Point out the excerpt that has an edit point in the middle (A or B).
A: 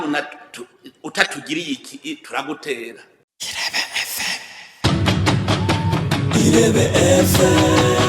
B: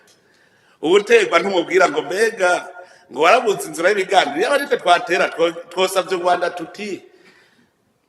A